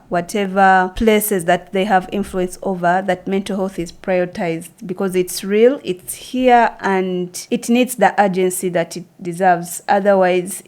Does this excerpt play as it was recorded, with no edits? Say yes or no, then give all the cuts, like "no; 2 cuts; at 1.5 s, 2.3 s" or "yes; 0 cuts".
no; 2 cuts; at 0.9 s, 7.3 s